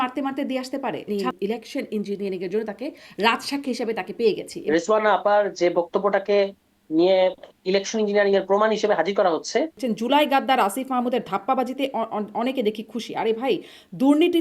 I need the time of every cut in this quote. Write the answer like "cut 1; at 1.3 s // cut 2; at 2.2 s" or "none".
cut 1; at 1.1 s // cut 2; at 4.5 s // cut 3; at 9.8 s